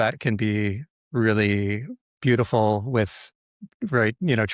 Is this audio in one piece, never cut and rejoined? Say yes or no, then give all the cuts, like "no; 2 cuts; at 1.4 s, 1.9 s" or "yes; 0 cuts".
yes; 0 cuts